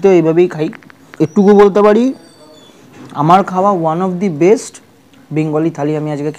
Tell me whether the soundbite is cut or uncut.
cut